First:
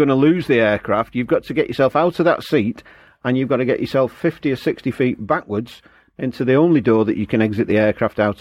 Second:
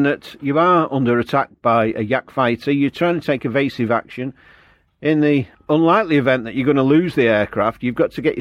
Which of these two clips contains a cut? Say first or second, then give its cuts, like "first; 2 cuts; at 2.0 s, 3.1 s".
second; 1 cut; at 5.5 s